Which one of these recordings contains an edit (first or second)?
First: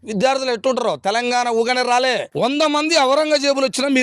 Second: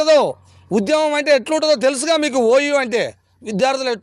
first